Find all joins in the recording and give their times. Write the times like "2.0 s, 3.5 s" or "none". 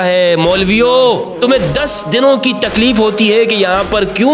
1.3 s

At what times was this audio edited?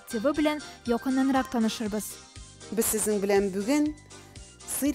2.6 s

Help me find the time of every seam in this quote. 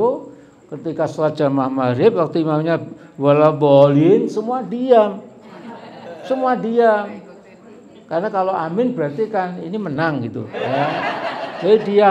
none

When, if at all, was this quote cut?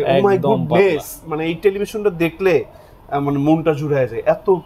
none

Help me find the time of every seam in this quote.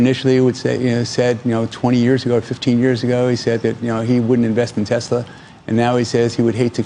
none

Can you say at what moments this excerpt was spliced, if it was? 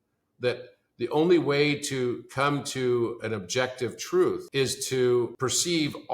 4.4 s, 5.3 s

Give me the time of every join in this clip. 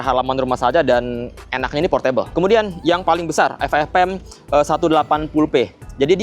none

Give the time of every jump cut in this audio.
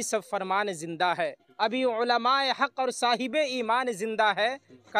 none

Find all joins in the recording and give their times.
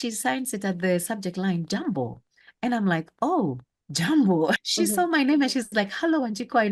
4.6 s

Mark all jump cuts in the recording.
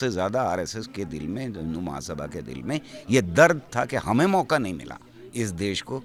none

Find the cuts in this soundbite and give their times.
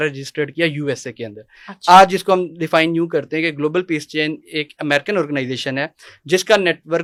none

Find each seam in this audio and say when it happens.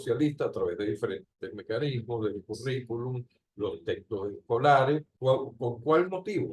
5.1 s

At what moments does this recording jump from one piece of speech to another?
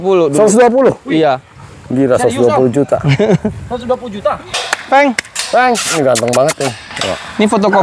4.6 s

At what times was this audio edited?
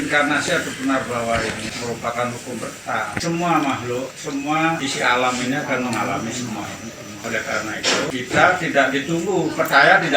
1.7 s, 3.2 s, 4.8 s, 7.2 s, 8.1 s

